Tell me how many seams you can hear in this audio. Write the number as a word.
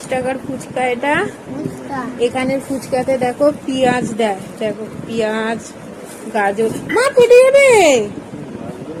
zero